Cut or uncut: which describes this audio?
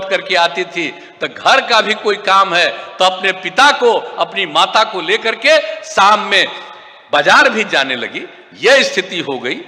uncut